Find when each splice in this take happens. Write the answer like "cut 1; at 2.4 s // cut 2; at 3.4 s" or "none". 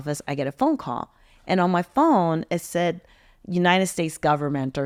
none